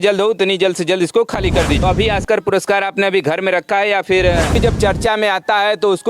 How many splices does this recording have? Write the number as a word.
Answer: two